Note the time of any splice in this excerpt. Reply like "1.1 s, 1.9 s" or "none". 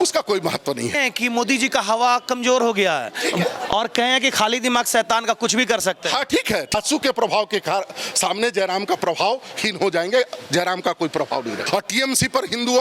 0.9 s, 6.7 s, 11.6 s